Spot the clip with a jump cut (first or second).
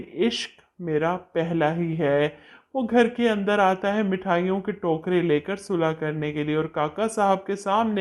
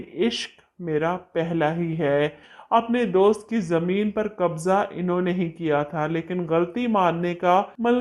second